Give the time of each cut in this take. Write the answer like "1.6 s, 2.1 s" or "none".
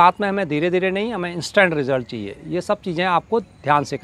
none